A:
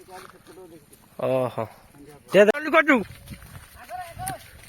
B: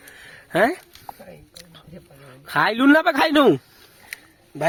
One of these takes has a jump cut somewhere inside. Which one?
A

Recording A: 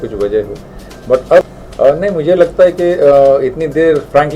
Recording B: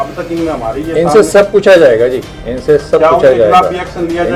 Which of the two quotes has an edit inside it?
A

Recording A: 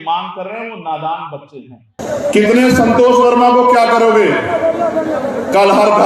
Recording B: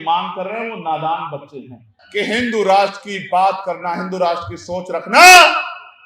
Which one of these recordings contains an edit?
A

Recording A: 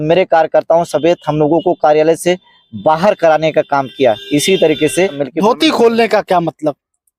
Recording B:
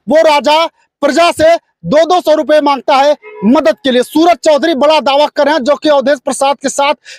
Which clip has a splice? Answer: A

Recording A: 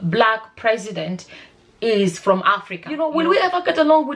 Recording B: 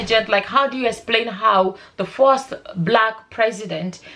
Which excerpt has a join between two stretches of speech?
A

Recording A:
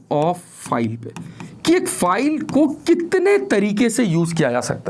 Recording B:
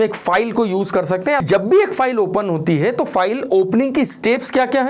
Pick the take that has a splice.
B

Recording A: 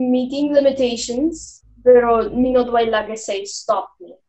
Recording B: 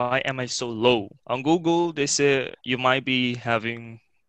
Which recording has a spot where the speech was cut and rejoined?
B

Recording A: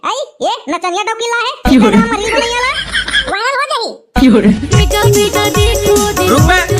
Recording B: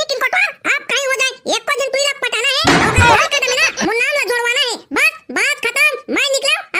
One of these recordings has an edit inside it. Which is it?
A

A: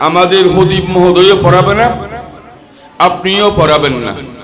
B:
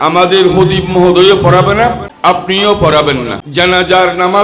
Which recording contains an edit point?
B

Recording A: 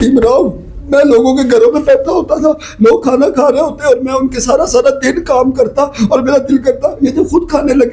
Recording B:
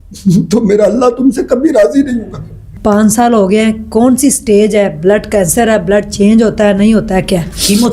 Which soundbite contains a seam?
B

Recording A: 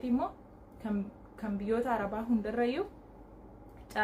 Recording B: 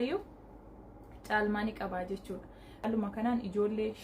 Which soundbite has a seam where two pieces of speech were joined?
B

